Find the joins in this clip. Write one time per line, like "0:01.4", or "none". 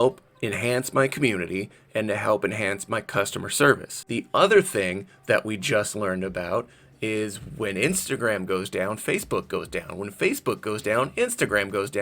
0:04.0